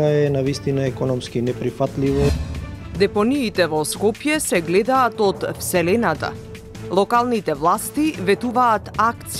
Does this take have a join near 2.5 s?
yes; 1 cut; at 2.5 s

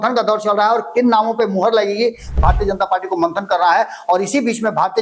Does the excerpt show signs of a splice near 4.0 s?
no; 1 cut; at 2.3 s

